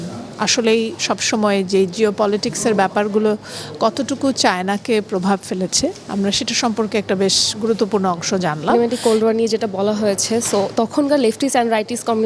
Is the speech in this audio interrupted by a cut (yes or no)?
yes